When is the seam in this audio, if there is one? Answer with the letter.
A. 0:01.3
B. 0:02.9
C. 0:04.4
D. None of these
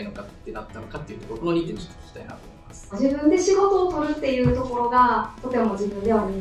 B